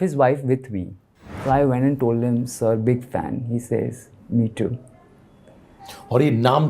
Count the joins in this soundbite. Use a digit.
1